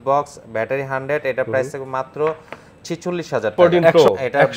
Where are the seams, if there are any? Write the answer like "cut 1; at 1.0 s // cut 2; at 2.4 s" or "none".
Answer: cut 1; at 3.5 s